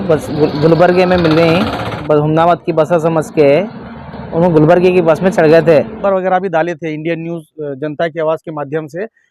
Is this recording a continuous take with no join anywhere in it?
no; 2 cuts; at 2.0 s, 5.9 s

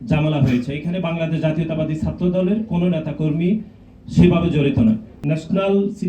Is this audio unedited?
no; 1 cut; at 5.1 s

